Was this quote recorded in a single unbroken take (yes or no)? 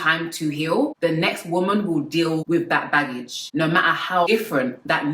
no